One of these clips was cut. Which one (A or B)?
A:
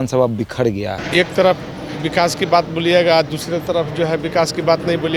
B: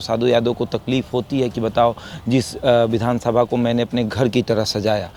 A